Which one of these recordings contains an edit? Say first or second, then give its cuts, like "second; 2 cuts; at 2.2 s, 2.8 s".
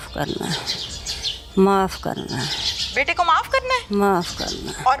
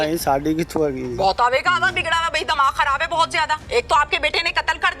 second; 1 cut; at 3.6 s